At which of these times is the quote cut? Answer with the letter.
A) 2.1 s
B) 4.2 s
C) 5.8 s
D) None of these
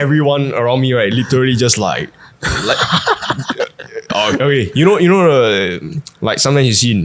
D